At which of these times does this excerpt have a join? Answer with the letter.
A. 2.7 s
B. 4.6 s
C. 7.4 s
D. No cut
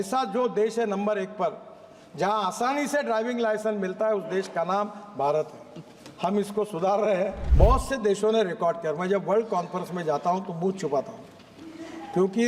C